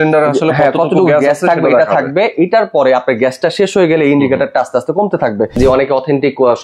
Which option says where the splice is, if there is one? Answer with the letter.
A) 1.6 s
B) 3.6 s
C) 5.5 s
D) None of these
C